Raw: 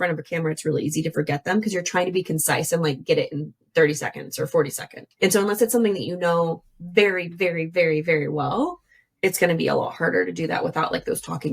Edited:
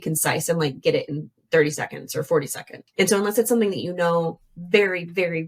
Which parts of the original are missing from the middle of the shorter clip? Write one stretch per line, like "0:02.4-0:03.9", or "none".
none